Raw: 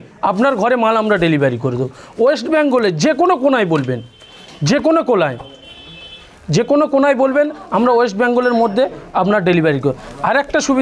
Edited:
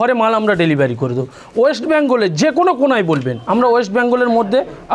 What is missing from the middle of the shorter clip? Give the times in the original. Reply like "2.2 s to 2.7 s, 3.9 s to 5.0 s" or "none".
4.0 s to 7.6 s